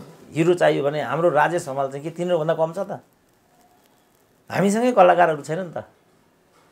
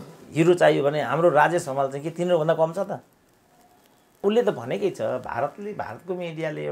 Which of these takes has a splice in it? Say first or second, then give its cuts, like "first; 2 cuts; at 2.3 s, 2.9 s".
second; 1 cut; at 4.2 s